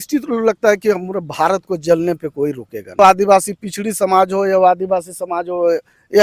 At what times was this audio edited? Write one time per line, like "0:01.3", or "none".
0:03.0